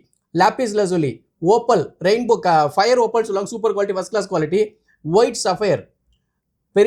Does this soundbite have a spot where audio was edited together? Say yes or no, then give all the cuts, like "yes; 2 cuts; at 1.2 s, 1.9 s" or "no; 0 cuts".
no; 0 cuts